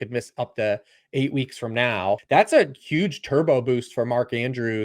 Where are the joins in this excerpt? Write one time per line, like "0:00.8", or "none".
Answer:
0:02.2

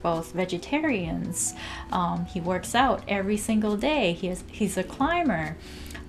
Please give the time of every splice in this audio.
none

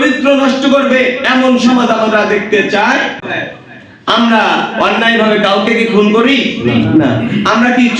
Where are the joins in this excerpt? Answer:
0:03.2

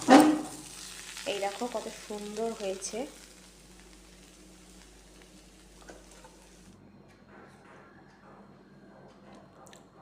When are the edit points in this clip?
0:06.7

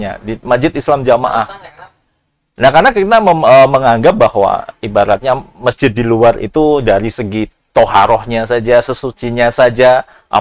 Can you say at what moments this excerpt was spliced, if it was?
none

